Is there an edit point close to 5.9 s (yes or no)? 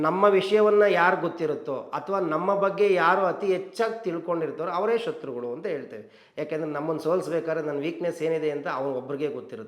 no